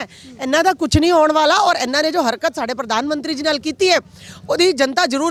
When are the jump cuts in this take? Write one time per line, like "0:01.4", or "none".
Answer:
none